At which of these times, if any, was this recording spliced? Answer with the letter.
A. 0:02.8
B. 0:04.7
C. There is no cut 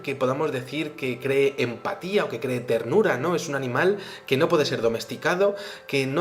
A